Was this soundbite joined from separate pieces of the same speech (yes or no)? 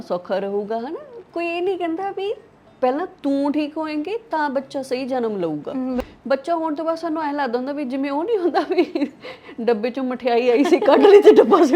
yes